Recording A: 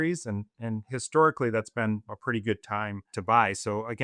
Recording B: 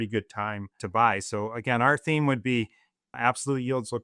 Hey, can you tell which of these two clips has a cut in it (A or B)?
B